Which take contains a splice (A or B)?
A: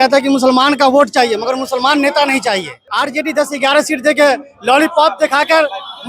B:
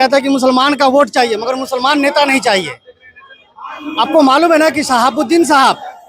A